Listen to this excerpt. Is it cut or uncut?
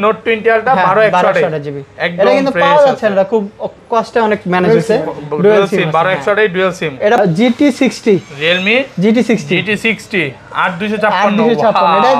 cut